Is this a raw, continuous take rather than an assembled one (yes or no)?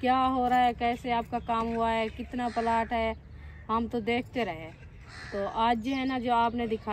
yes